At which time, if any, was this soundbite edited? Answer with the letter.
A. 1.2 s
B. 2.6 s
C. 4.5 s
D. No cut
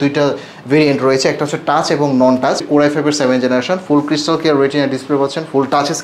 B